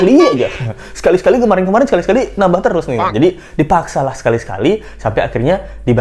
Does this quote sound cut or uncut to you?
uncut